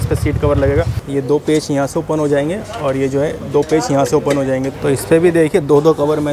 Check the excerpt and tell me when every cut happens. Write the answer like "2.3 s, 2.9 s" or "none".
1.0 s, 4.7 s